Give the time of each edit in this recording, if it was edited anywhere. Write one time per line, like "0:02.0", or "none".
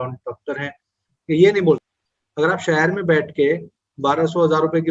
0:02.0